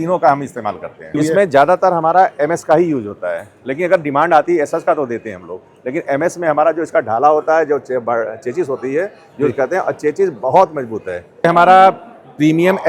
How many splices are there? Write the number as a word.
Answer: two